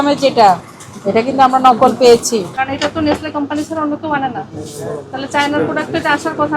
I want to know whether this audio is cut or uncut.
cut